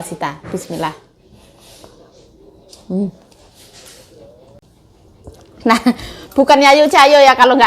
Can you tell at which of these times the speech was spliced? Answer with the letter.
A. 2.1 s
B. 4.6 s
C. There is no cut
B